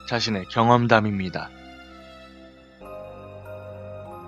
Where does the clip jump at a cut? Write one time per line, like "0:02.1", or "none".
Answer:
none